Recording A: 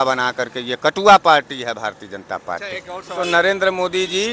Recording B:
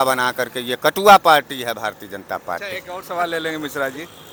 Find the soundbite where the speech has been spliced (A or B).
A